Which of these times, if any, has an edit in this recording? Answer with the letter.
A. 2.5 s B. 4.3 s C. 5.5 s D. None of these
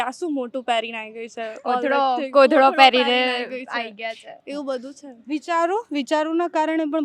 D